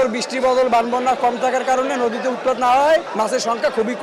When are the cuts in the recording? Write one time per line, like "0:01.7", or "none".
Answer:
0:03.1